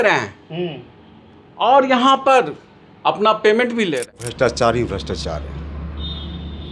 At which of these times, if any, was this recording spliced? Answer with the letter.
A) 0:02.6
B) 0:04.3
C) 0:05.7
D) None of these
B